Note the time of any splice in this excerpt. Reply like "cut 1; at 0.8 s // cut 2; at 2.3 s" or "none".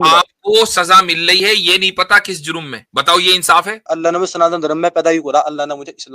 cut 1; at 2.8 s // cut 2; at 3.9 s